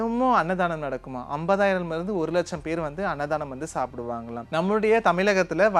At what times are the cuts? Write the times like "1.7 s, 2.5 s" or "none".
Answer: 4.4 s

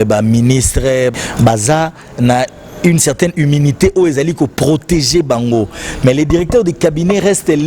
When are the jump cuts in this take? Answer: 1.1 s

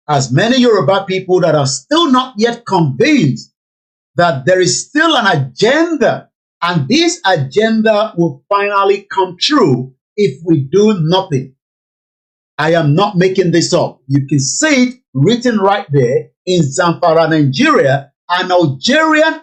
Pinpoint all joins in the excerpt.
none

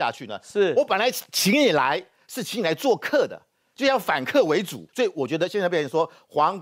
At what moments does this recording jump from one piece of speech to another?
4.8 s

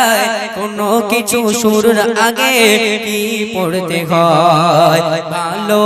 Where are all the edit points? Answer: none

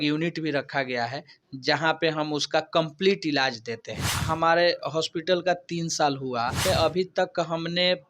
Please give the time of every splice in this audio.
4.2 s, 6.6 s

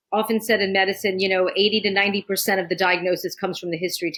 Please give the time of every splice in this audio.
none

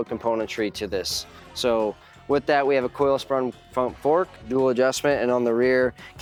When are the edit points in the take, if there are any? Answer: none

